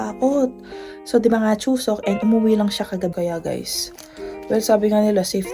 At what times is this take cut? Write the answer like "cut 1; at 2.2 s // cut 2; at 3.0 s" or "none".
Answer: cut 1; at 3.1 s